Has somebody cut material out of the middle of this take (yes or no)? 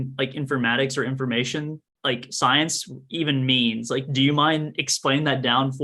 no